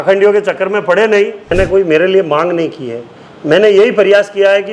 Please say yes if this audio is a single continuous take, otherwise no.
no